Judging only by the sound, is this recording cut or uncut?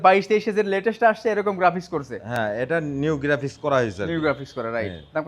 uncut